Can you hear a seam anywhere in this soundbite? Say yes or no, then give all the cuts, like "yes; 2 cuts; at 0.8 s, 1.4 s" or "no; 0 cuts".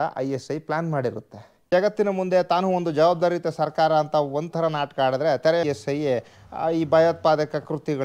yes; 2 cuts; at 1.7 s, 5.6 s